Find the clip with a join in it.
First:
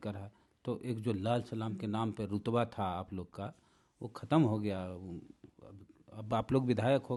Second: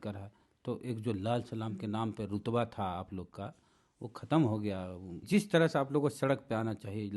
second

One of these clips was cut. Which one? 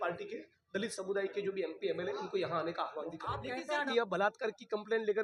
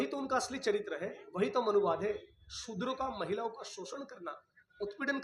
first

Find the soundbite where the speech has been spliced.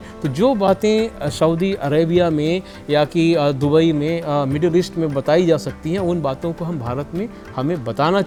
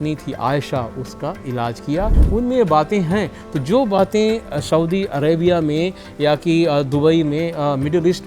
second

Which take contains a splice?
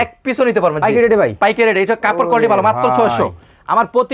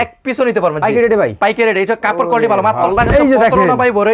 second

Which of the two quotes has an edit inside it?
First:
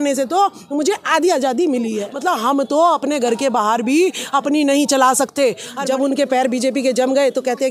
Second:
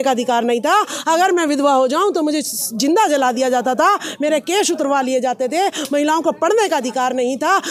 first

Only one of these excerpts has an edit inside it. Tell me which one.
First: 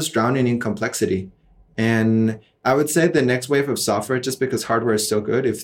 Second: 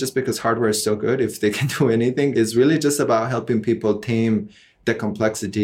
second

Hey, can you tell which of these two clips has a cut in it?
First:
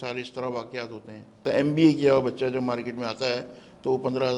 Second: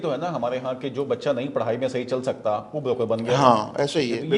first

